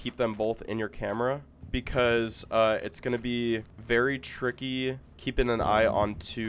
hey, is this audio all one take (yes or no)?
no